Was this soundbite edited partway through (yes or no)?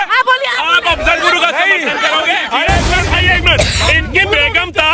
yes